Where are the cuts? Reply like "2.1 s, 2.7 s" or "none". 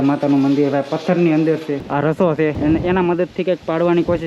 1.8 s, 2.6 s